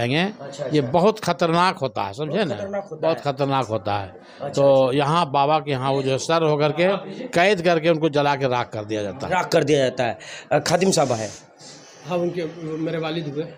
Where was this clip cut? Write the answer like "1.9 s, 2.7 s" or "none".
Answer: none